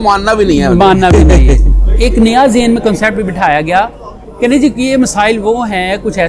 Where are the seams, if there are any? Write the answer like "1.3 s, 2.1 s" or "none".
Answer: 1.7 s